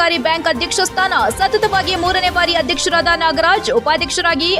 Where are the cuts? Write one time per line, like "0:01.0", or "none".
none